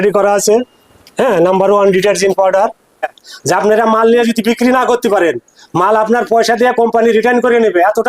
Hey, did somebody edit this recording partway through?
yes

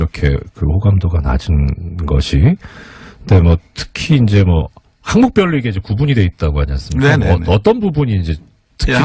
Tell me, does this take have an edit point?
yes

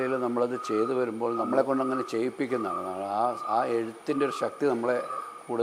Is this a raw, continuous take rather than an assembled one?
no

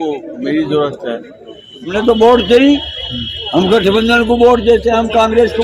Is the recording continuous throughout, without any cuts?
no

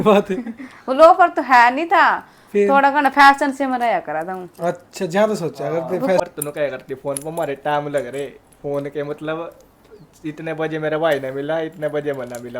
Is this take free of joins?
no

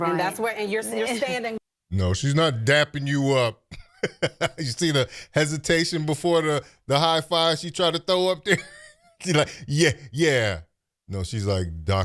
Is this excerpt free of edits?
no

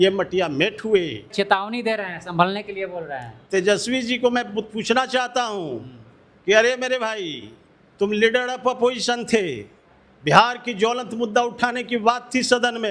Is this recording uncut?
no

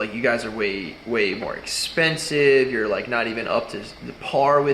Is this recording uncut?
yes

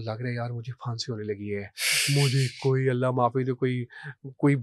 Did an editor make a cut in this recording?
no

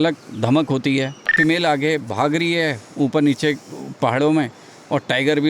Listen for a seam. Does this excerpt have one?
yes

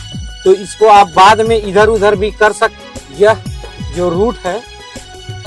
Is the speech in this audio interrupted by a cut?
yes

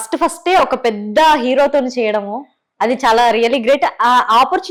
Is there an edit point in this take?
no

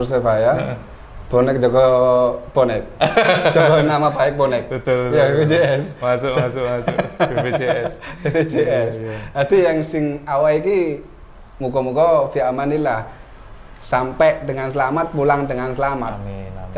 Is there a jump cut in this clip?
no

